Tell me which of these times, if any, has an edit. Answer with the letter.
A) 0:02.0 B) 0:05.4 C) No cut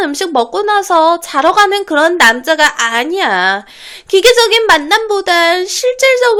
C